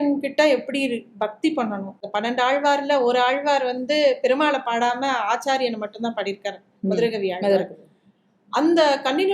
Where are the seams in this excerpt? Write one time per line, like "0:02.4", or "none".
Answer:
0:02.0